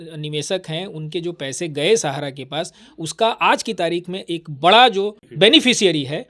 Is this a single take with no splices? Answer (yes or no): no